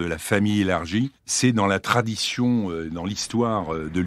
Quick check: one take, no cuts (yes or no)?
yes